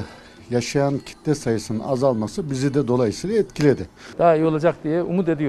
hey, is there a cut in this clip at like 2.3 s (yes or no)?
no